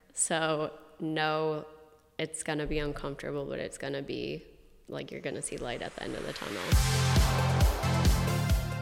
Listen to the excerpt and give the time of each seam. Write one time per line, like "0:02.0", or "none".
0:06.7